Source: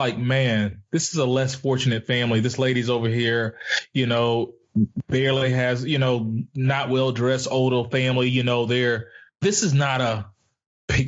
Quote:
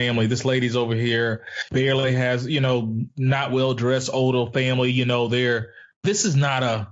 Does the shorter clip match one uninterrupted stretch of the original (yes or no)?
no